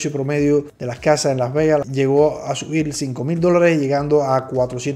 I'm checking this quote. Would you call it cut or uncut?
cut